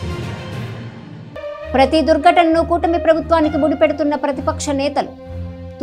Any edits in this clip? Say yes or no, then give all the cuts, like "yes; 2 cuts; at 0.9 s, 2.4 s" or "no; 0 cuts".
yes; 1 cut; at 1.2 s